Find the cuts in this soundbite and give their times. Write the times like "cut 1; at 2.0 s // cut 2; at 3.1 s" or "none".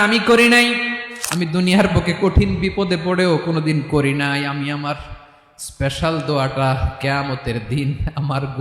cut 1; at 1.0 s